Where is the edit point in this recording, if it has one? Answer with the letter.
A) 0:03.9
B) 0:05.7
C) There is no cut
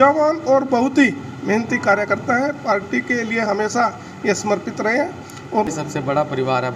B